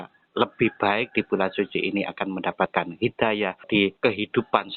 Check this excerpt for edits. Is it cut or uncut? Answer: cut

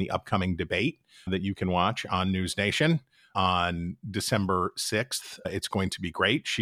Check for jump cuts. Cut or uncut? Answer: cut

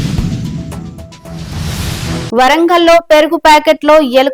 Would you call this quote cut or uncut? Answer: uncut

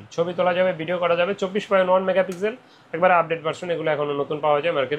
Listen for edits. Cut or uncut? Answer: uncut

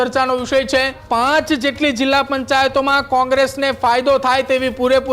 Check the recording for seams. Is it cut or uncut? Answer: cut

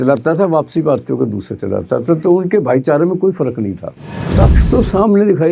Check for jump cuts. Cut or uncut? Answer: cut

